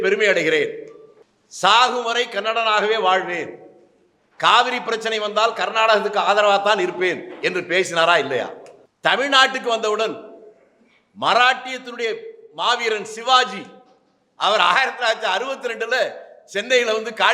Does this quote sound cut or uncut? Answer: uncut